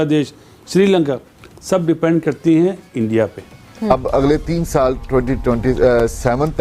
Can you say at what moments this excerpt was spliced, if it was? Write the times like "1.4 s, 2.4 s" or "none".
4.0 s